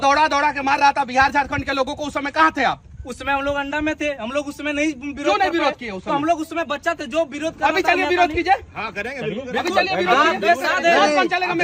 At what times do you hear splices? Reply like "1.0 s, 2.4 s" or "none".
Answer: none

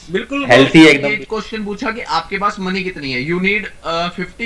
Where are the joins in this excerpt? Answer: 1.0 s

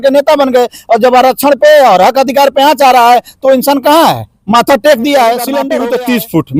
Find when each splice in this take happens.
5.7 s

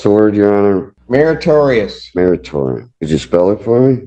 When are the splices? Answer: 0.9 s, 2.9 s

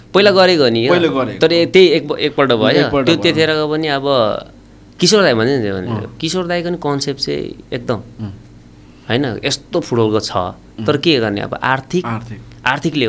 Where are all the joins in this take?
none

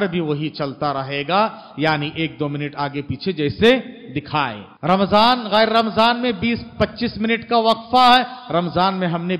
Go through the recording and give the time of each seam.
4.6 s

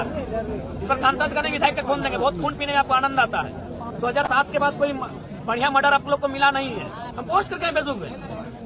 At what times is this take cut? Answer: 3.8 s, 7.1 s

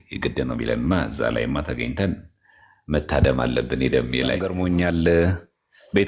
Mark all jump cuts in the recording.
4.5 s

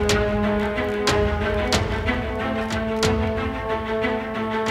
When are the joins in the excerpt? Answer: 3.5 s

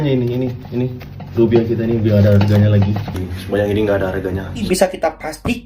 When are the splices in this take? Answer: 4.6 s

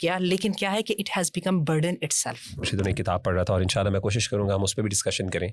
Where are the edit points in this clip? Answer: 2.7 s

